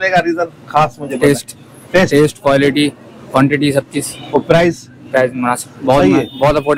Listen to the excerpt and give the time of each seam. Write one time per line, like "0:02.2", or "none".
none